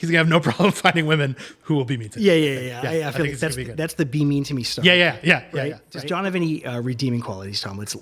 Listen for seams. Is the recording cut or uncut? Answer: cut